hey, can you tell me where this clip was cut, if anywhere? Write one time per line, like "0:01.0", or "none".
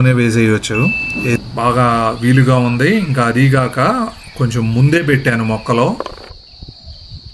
0:01.4